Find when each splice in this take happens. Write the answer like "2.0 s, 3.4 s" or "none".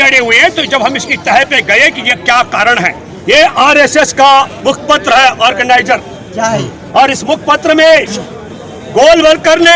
3.1 s